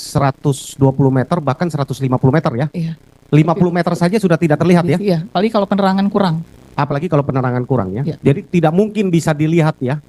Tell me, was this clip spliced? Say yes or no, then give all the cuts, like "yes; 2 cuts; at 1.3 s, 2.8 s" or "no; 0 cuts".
no; 0 cuts